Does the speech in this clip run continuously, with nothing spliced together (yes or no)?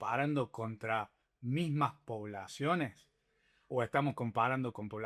yes